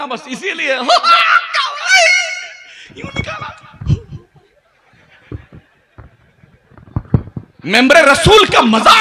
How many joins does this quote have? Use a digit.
1